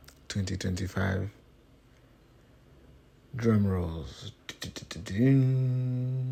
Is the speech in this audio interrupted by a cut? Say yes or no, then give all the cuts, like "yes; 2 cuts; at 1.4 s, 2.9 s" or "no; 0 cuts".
no; 0 cuts